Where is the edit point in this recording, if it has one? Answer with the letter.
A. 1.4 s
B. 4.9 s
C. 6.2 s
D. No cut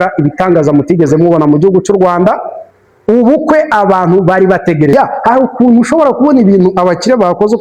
B